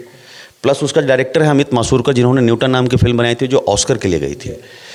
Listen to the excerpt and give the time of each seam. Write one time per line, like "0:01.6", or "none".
none